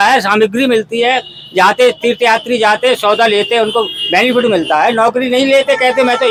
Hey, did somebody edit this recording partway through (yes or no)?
no